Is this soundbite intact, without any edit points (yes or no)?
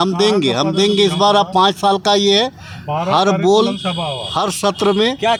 yes